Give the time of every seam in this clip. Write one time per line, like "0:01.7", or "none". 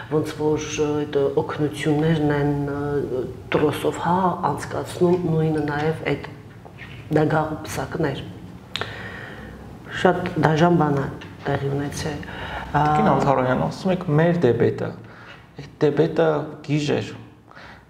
none